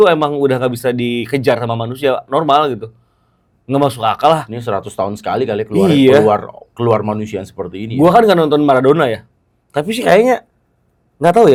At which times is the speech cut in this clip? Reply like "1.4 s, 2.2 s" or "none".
none